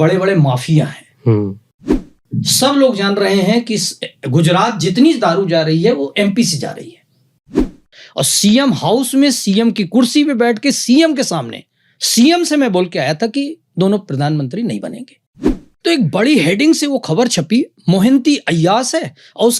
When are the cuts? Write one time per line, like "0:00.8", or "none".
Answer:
0:02.0
0:07.5
0:15.4